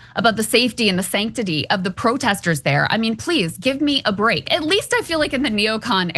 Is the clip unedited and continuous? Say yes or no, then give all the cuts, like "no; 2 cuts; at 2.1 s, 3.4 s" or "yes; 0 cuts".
no; 1 cut; at 4.5 s